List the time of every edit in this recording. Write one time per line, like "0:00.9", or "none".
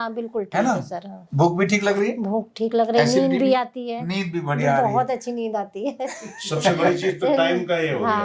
0:01.2

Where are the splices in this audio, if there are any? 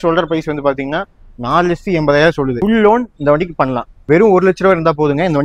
0:03.9

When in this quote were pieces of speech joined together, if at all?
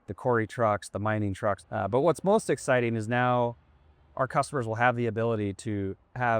0:01.6

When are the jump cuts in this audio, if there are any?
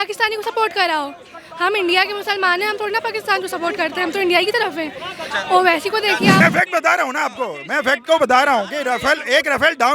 0:06.4

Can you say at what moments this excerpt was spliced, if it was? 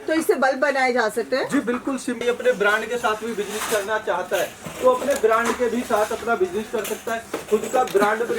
0:02.2

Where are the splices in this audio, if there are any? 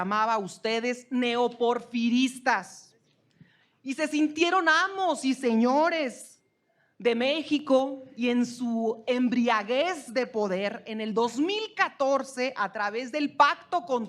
none

